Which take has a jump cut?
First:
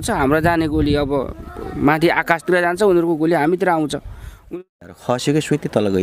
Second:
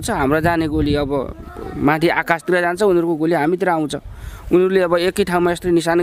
first; 1 cut; at 4.5 s

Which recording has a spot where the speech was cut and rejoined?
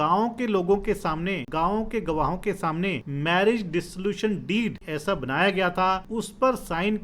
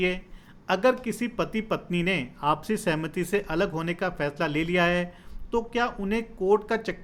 first; 4 cuts; at 1.4 s, 3.1 s, 4.9 s, 6.1 s

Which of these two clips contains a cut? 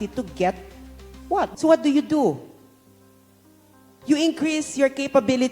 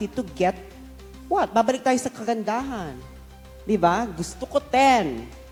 first; 1 cut; at 1.5 s

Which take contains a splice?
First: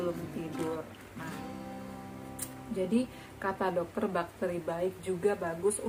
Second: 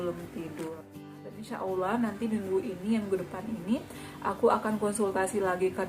second; 1 cut; at 1.5 s

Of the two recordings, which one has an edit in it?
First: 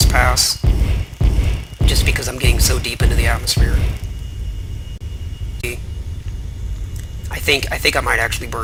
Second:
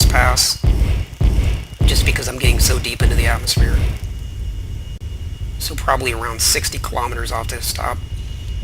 second; 1 cut; at 5.6 s

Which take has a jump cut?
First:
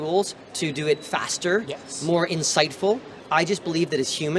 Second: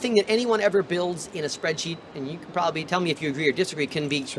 first; 1 cut; at 3.1 s

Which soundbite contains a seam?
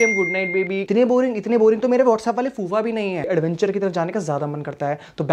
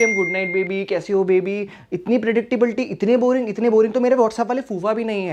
first; 2 cuts; at 0.8 s, 3.2 s

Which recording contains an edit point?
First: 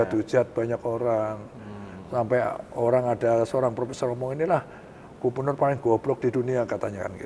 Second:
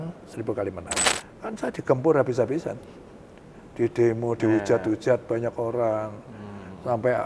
second; 1 cut; at 1.1 s

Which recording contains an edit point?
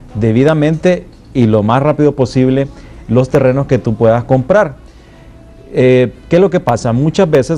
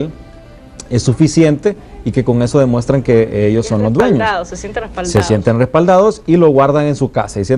second; 1 cut; at 6.5 s

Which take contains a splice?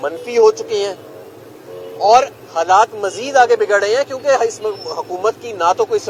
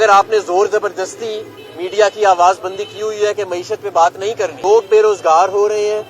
second; 1 cut; at 4.6 s

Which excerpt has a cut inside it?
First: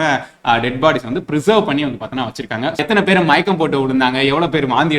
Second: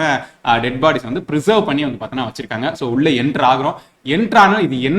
first; 1 cut; at 2.8 s

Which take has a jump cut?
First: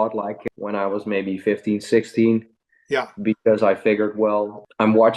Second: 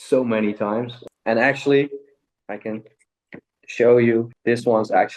second; 1 cut; at 1.0 s

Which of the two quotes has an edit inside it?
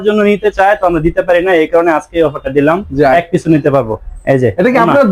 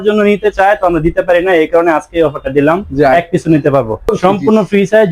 second; 1 cut; at 4.2 s

